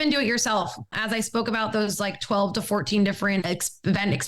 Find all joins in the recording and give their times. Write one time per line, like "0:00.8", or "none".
0:00.9
0:03.4